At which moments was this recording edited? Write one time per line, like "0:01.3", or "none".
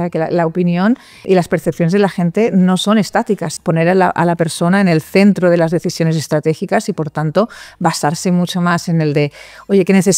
0:01.2
0:03.5